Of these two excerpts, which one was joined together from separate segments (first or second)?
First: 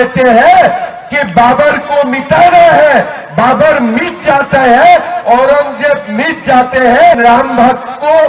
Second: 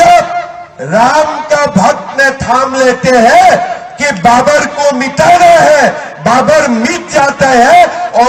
first